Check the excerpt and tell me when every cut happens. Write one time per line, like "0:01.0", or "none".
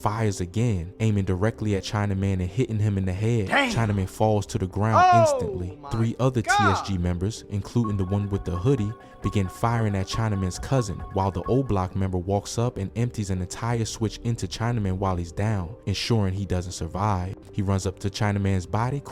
0:17.3